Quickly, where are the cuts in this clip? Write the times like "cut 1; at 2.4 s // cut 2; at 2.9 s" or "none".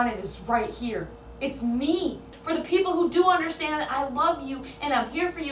cut 1; at 2.4 s